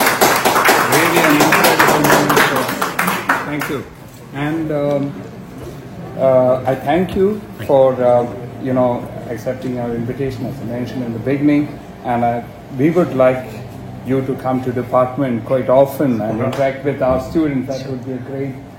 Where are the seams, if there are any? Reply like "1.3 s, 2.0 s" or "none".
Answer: none